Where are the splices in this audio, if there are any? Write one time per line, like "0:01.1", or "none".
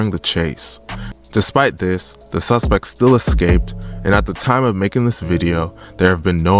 0:01.0